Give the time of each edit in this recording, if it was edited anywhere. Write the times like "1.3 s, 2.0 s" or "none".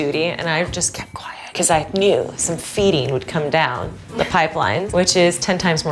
4.9 s